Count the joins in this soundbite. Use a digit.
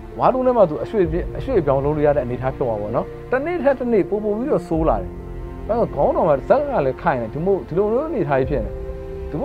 1